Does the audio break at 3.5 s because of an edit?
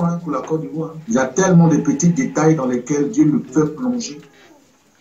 no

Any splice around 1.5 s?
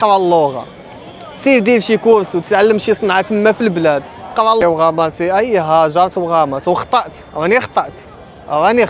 no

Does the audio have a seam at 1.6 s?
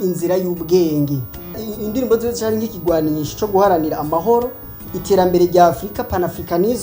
yes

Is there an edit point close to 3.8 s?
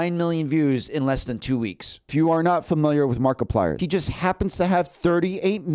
yes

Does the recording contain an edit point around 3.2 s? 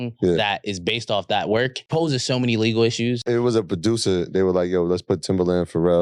yes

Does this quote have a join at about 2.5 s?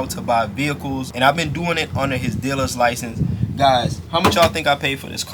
no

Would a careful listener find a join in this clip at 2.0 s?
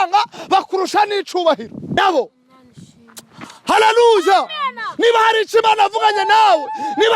yes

